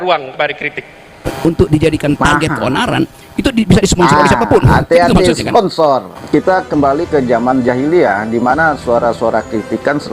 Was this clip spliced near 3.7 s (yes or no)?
no